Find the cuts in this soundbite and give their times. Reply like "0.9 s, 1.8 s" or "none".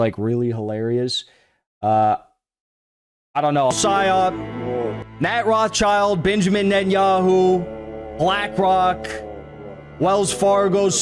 3.7 s